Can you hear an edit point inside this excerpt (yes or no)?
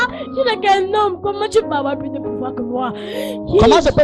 no